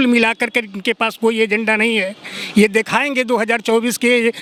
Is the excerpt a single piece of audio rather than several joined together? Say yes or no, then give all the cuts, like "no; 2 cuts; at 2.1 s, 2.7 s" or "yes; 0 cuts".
yes; 0 cuts